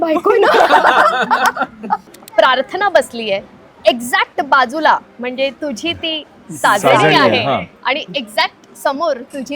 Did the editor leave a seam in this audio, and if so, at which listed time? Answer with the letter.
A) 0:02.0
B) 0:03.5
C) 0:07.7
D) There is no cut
A